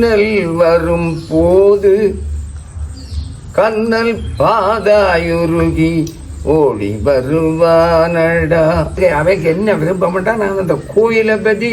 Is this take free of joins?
no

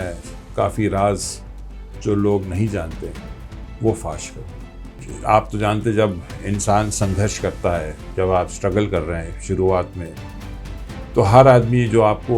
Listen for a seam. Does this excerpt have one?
yes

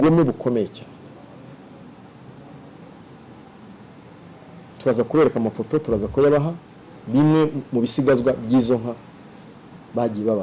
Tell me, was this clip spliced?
no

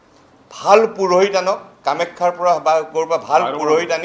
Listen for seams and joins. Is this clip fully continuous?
yes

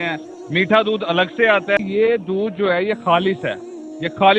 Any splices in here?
yes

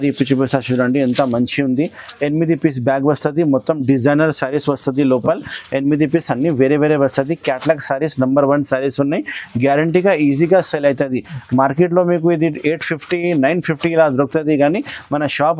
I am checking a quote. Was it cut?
no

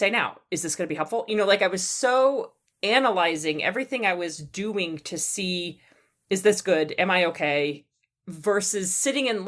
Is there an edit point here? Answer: no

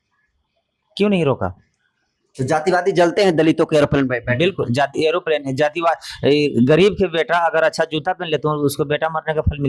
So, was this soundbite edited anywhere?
no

